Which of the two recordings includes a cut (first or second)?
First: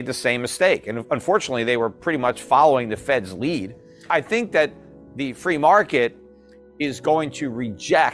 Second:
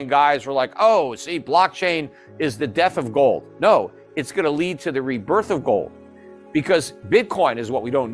first